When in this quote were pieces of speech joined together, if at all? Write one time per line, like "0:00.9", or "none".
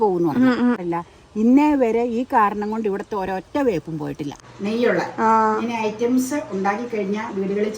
0:00.8
0:04.3